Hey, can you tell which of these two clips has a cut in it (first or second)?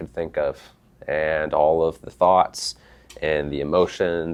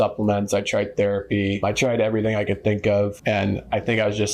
second